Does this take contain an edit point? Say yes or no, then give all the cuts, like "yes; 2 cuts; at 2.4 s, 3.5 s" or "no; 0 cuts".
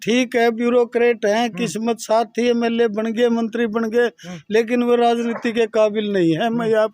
yes; 1 cut; at 4.3 s